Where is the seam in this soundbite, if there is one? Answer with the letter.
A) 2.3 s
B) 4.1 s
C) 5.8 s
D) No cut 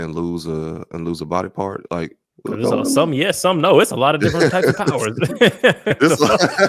A